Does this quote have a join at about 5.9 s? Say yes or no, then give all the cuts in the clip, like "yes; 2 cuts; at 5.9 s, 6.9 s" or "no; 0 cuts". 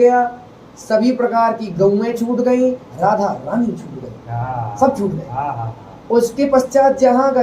no; 0 cuts